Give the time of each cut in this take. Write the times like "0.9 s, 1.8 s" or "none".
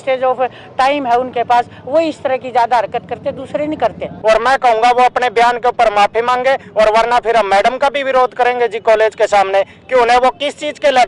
4.1 s